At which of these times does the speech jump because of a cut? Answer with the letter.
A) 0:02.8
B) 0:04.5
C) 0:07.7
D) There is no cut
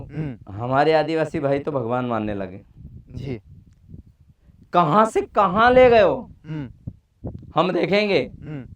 D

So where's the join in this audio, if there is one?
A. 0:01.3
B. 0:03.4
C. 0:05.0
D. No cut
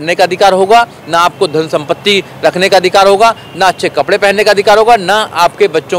D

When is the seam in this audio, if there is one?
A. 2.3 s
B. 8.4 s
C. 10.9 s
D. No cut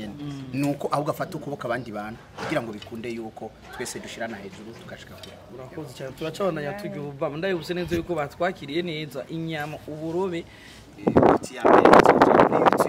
C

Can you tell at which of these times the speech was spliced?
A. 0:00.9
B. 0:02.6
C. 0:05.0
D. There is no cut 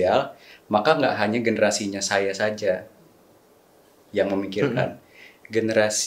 D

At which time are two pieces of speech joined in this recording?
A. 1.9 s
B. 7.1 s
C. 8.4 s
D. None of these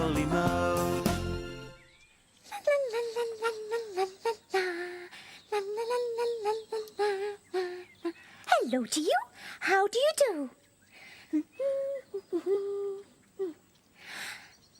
C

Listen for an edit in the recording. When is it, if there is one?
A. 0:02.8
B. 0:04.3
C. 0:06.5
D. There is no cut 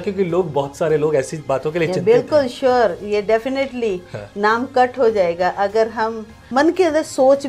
C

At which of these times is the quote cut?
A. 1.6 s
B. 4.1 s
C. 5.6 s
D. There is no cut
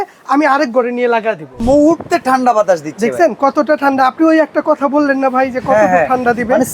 A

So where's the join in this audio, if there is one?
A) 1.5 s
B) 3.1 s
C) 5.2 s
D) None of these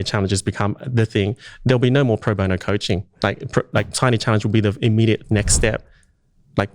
B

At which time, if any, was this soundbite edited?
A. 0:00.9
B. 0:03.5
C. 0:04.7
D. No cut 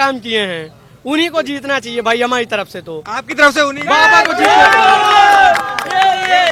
D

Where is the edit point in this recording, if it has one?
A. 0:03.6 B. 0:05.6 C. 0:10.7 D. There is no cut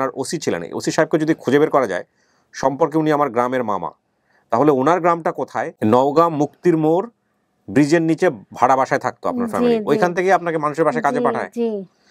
B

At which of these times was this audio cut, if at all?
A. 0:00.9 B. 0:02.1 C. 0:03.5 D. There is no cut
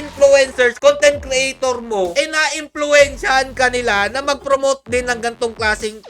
B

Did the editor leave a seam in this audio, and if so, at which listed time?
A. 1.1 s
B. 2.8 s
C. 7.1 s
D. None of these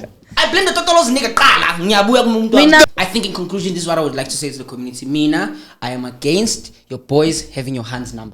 B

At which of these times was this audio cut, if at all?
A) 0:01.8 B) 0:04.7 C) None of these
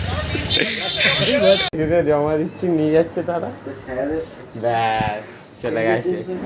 A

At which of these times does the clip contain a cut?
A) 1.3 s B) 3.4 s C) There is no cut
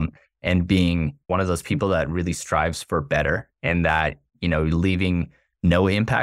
A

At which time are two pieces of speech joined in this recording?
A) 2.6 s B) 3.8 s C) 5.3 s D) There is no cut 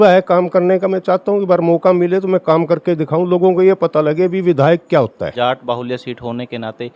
C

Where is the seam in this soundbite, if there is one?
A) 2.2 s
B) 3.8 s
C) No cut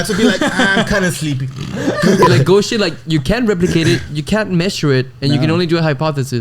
A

